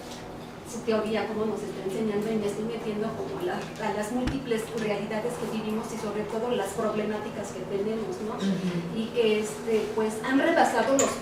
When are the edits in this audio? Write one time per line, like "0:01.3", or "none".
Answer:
none